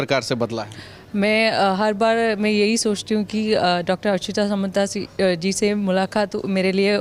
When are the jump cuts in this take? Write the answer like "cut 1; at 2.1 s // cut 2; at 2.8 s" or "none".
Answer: none